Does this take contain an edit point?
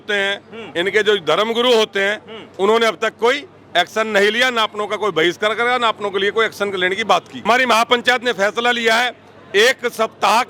yes; 1 cut; at 7.4 s

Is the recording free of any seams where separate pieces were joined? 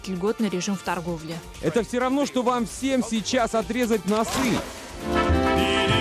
yes; 0 cuts

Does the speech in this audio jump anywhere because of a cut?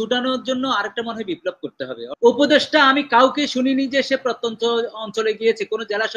yes; 1 cut; at 2.0 s

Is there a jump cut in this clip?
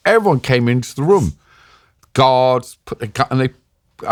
no; 0 cuts

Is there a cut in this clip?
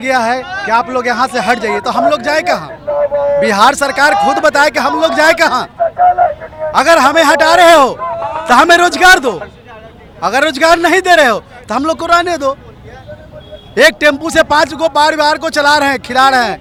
no; 0 cuts

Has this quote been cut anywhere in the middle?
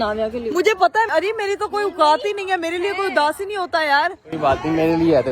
yes; 1 cut; at 1.1 s

